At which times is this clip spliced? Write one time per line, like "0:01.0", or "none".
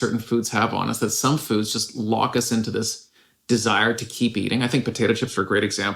none